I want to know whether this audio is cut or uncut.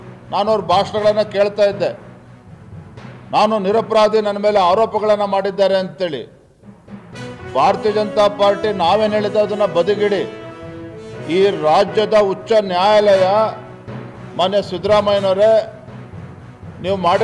uncut